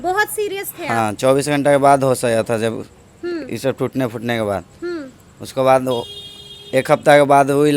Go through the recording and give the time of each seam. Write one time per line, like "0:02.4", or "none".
none

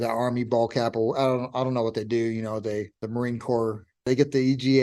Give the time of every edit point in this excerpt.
0:03.0
0:04.1

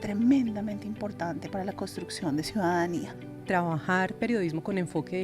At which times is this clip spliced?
0:03.3

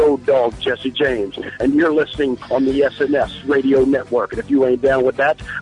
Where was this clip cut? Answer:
0:02.4

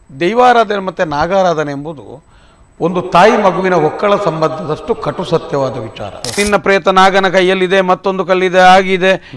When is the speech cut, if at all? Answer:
0:06.4

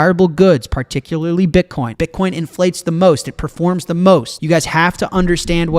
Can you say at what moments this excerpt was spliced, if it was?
0:01.8
0:04.3

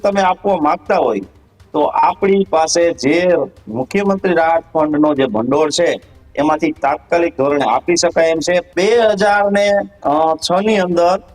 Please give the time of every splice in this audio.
0:08.7

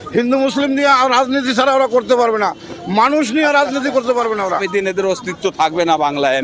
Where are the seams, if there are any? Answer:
0:04.6

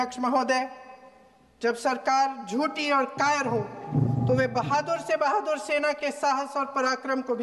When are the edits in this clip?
none

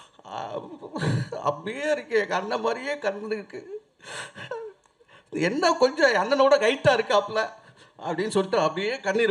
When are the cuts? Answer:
none

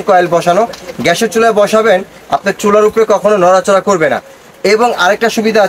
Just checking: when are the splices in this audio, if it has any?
none

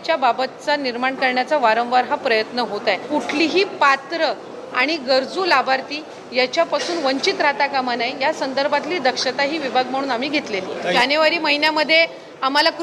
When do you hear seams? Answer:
0:03.0
0:10.9

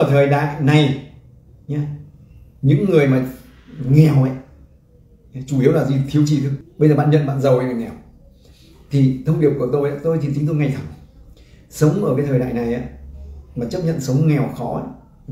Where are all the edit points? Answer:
0:06.6

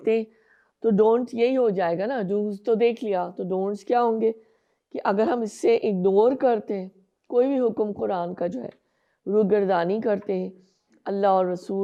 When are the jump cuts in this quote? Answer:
none

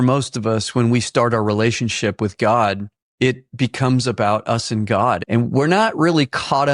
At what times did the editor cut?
0:05.2

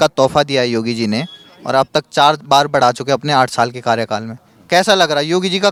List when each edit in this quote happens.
none

